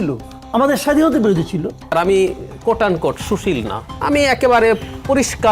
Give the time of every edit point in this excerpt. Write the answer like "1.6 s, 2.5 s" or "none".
1.8 s